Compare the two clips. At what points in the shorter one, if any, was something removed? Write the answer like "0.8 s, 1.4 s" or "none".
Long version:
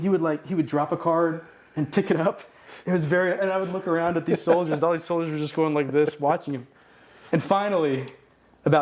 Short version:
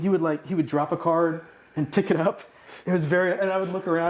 none